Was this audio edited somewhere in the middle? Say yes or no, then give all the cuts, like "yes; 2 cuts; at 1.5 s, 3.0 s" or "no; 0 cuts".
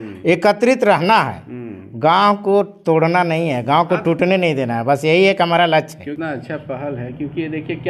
yes; 1 cut; at 6.1 s